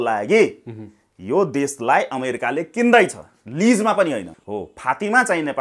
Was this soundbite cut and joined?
yes; 1 cut; at 4.4 s

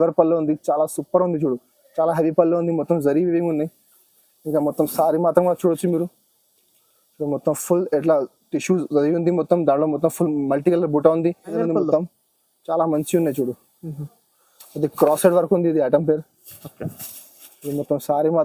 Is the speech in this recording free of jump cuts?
no; 1 cut; at 11.5 s

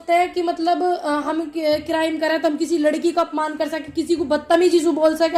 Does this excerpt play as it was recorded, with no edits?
yes; 0 cuts

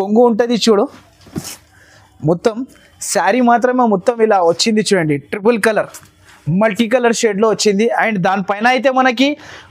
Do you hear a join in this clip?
no; 0 cuts

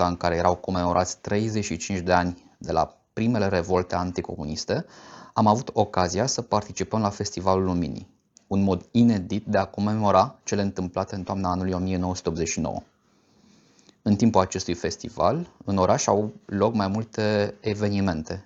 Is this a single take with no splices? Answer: yes; 0 cuts

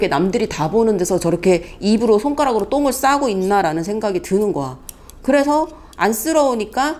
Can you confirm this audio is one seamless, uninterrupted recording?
yes; 0 cuts

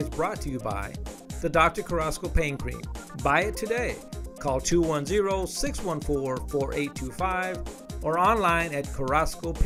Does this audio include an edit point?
no; 0 cuts

